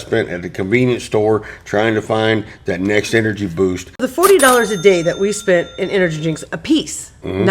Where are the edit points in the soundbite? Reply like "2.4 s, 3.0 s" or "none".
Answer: 4.1 s

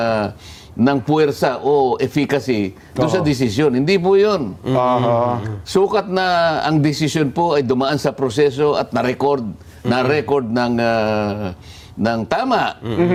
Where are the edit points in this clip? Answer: none

